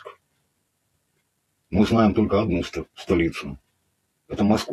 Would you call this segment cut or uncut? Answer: uncut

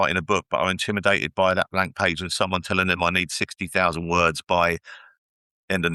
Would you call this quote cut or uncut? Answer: uncut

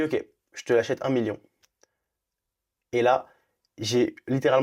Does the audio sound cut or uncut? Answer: uncut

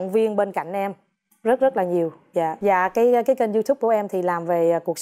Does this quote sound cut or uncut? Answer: cut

